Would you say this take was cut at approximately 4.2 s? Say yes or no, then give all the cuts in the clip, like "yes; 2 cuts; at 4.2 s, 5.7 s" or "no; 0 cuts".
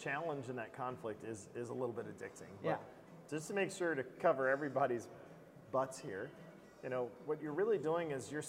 no; 0 cuts